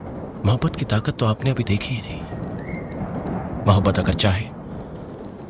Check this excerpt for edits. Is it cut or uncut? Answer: uncut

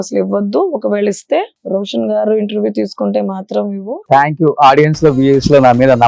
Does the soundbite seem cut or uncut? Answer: cut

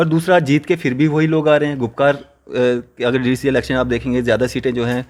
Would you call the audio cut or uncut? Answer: uncut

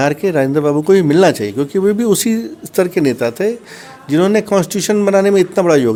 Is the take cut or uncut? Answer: uncut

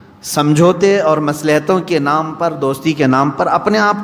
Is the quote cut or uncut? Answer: uncut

